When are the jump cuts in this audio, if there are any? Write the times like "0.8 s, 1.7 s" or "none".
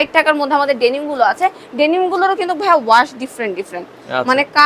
none